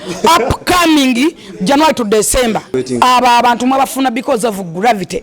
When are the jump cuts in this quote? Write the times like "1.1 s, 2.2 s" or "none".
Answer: 2.7 s

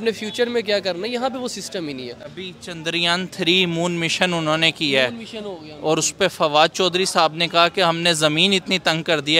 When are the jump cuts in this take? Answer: none

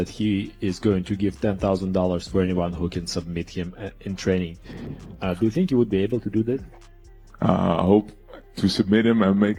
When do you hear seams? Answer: none

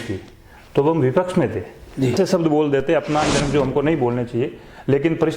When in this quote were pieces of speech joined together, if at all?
2.1 s

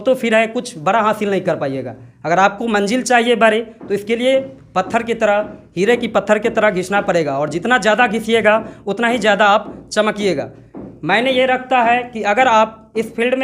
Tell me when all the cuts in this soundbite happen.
none

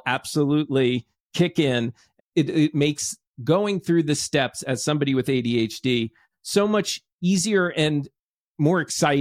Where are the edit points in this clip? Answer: 2.0 s

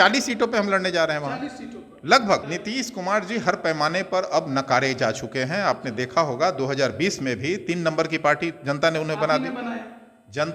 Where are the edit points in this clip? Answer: 2.4 s

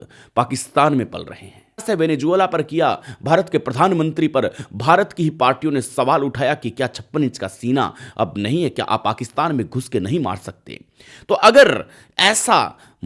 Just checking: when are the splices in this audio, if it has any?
1.8 s

